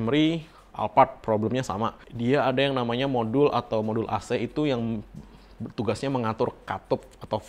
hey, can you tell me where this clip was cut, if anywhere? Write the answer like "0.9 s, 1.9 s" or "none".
none